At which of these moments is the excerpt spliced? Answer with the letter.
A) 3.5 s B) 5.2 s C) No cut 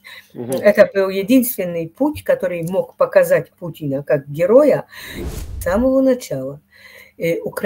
B